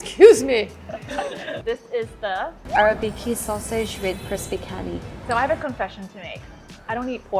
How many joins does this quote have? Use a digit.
1